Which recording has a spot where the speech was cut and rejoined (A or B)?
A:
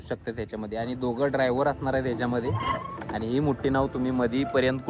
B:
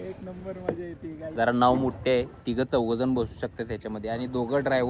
B